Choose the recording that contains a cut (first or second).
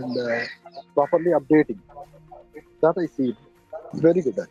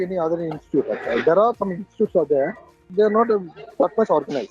second